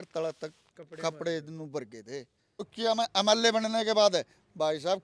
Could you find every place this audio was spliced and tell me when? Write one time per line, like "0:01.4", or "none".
0:02.7